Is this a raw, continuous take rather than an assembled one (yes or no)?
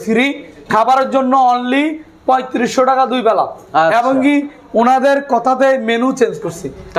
yes